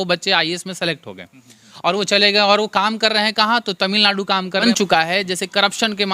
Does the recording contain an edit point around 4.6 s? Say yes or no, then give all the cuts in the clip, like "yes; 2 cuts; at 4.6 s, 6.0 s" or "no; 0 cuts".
yes; 1 cut; at 4.6 s